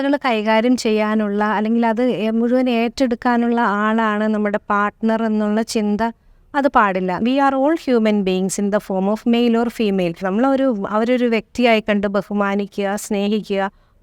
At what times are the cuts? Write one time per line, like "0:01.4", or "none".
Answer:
0:07.2
0:10.2